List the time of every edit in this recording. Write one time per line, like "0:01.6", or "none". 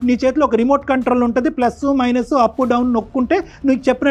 none